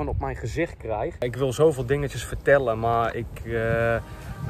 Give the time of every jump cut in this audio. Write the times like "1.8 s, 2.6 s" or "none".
1.2 s